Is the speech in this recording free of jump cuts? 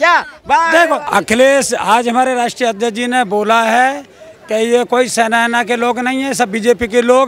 no; 1 cut; at 1.0 s

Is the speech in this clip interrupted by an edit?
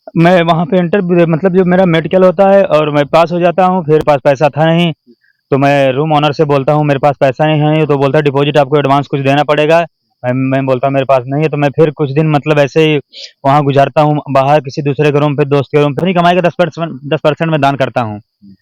yes; 2 cuts; at 4.0 s, 16.0 s

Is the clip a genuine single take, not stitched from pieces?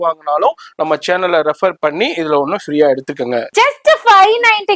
no; 1 cut; at 3.5 s

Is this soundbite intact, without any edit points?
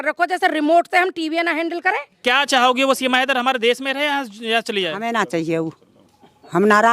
no; 1 cut; at 2.1 s

